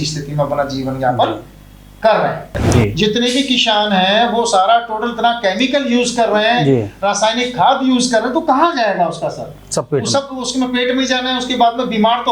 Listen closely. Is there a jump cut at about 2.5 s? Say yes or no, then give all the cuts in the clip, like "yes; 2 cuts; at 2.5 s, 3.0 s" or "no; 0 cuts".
yes; 1 cut; at 2.5 s